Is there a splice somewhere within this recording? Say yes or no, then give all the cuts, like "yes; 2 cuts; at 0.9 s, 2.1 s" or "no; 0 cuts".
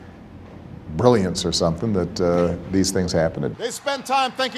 yes; 1 cut; at 3.5 s